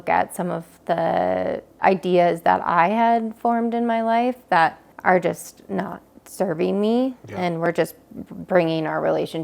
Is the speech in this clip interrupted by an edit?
yes; 2 cuts; at 1.8 s, 4.9 s

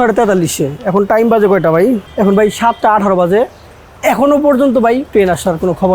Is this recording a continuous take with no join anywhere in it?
no; 2 cuts; at 2.1 s, 5.0 s

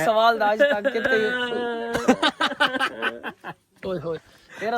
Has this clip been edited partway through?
no; 0 cuts

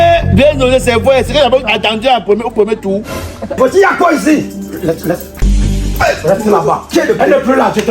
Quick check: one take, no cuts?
no; 1 cut; at 3.6 s

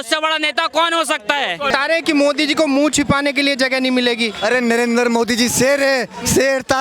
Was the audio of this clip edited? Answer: yes; 1 cut; at 1.7 s

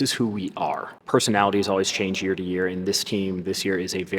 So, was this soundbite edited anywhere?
yes; 1 cut; at 1.0 s

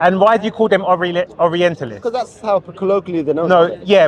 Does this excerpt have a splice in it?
no; 0 cuts

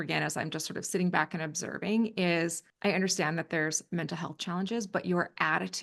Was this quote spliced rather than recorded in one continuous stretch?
yes; 1 cut; at 2.7 s

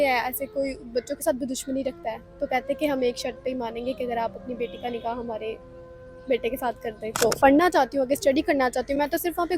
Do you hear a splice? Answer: yes; 1 cut; at 7.4 s

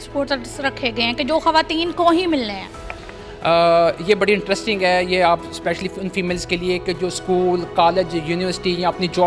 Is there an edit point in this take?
no; 0 cuts

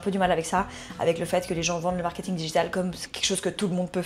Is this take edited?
no; 0 cuts

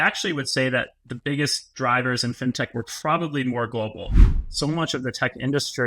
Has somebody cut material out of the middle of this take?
yes; 1 cut; at 4.2 s

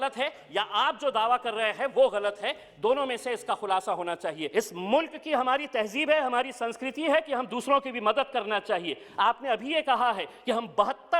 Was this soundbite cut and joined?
yes; 1 cut; at 4.4 s

